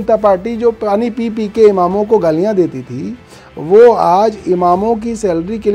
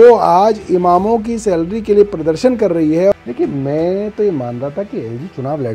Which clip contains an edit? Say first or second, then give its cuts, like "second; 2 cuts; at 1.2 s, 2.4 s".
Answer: second; 1 cut; at 3.1 s